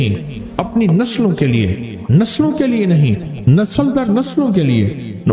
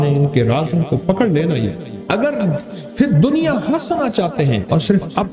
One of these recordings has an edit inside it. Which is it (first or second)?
second